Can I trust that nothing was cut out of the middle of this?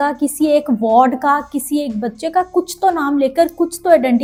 yes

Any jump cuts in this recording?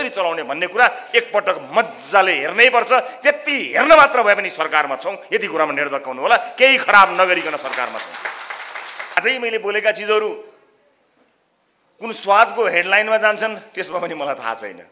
yes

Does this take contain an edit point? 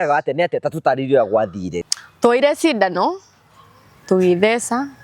yes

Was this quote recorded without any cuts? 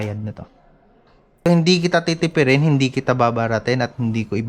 no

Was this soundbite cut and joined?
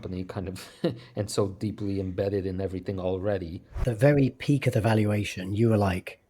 yes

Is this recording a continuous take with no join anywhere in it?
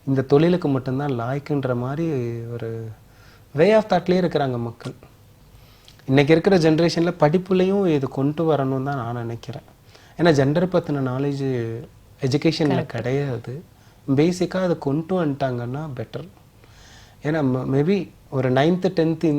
yes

